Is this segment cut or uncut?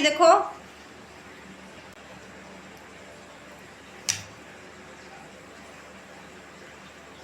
cut